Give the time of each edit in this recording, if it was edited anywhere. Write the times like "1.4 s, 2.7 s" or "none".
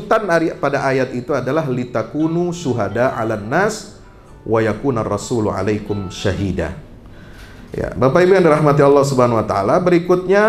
none